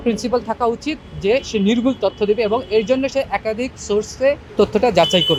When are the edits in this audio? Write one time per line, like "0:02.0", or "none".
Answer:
none